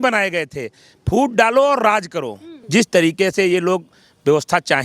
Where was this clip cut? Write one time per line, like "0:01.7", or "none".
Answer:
0:02.5